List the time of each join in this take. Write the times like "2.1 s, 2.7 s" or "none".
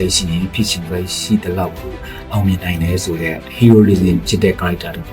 3.5 s